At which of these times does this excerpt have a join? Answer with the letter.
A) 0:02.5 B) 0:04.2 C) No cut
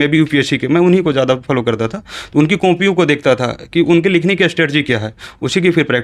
C